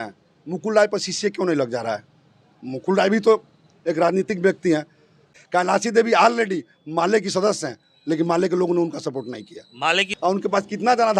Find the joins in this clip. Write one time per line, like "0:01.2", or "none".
0:05.3
0:10.1